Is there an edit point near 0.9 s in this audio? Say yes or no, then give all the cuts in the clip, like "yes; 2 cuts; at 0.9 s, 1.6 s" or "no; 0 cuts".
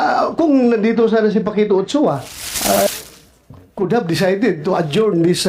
no; 1 cut; at 2.8 s